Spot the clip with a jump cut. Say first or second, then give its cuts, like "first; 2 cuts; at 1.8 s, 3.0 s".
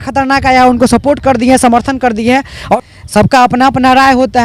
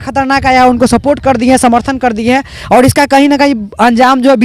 first; 1 cut; at 2.7 s